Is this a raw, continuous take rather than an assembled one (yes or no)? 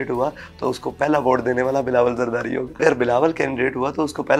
no